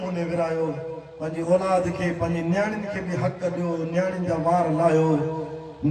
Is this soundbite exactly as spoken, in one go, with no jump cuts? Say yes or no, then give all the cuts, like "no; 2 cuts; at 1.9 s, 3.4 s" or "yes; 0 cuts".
yes; 0 cuts